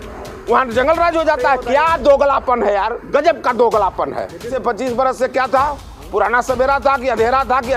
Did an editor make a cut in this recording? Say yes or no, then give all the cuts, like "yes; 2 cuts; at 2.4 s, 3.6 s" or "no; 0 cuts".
yes; 1 cut; at 4.5 s